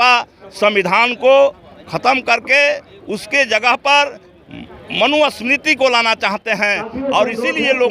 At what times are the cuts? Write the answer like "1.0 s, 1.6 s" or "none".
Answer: none